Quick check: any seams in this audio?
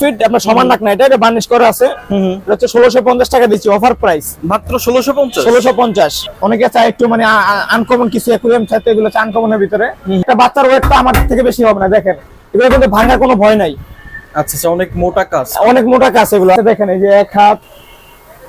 yes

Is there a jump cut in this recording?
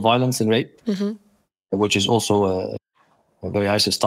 no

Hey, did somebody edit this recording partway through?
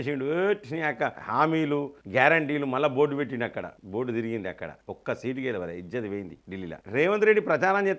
yes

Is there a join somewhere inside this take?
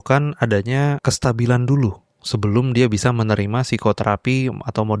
yes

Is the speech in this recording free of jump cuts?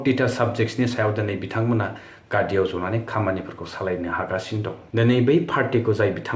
no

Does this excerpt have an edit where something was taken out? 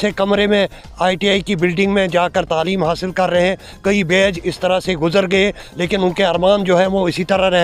no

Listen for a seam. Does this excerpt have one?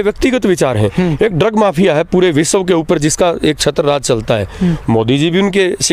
no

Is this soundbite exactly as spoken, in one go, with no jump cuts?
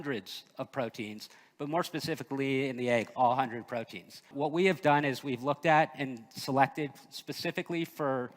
no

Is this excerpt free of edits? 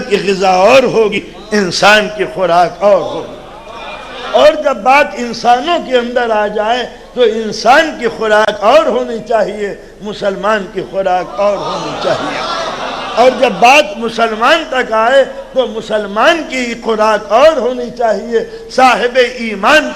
no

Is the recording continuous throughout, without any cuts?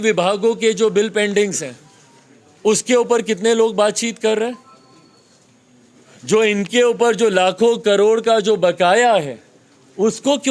yes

